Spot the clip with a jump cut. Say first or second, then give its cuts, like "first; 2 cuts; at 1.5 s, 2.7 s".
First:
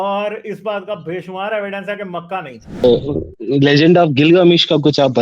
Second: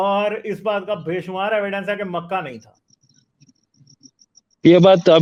first; 1 cut; at 2.8 s